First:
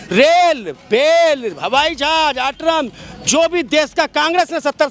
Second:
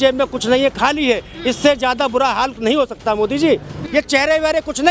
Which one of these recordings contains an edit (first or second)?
second